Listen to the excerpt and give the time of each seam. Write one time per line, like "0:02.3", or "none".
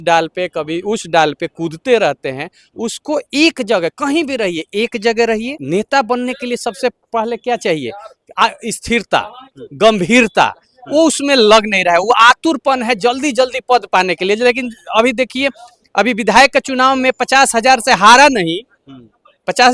0:05.5